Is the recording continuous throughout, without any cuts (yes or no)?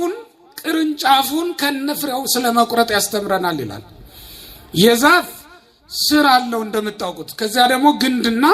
yes